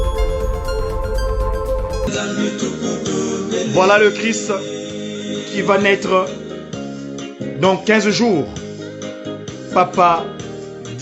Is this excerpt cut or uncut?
cut